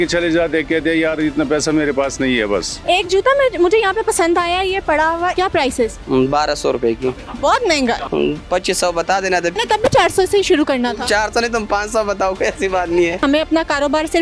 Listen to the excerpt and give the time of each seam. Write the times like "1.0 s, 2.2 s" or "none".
2.8 s, 5.4 s, 8.1 s, 13.2 s